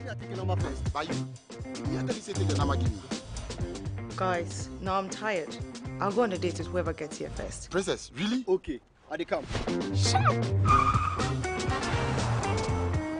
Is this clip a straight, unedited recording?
yes; 0 cuts

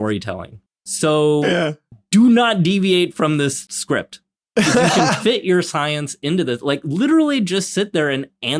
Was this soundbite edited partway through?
yes; 1 cut; at 3.7 s

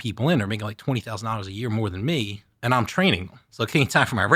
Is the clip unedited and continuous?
no; 1 cut; at 3.4 s

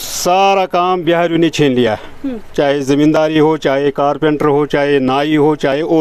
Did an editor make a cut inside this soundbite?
no; 0 cuts

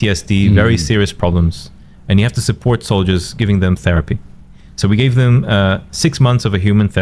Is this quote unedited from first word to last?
yes; 0 cuts

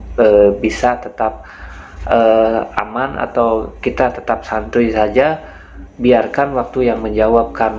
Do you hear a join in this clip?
no; 0 cuts

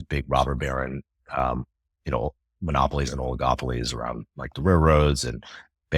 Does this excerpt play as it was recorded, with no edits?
yes; 0 cuts

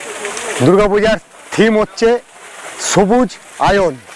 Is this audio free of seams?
yes; 0 cuts

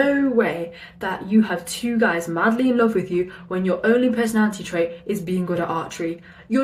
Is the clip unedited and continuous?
yes; 0 cuts

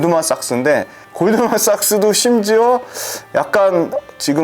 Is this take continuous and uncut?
yes; 0 cuts

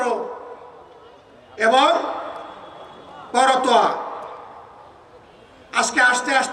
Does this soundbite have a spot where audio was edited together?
no; 0 cuts

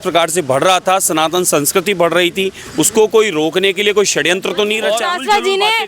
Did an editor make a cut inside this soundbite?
yes; 1 cut; at 4.8 s

